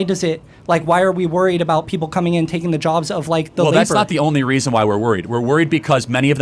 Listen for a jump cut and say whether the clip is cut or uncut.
uncut